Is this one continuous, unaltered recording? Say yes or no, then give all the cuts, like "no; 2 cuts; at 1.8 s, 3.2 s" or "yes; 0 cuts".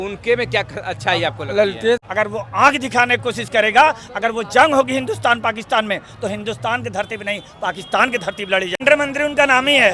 no; 2 cuts; at 2.0 s, 8.8 s